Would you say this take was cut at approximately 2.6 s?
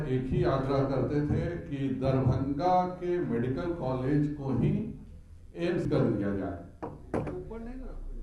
no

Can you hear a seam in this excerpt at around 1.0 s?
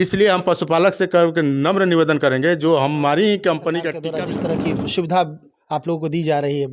no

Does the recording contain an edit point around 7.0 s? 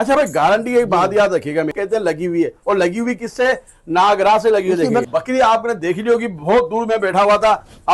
no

